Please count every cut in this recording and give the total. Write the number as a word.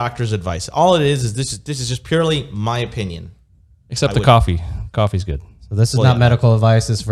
zero